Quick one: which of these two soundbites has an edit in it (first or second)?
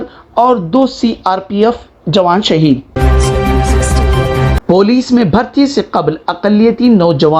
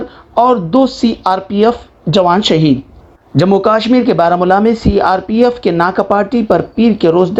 first